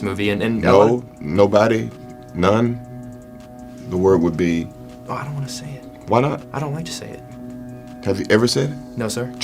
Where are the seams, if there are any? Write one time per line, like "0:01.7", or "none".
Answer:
none